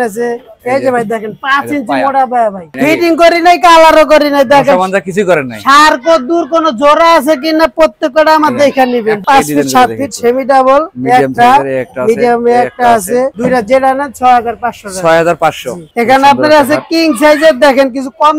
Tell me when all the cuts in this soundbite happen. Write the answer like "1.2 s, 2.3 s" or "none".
2.7 s, 9.2 s, 15.8 s